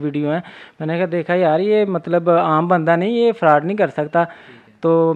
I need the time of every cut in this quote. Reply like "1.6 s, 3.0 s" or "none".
none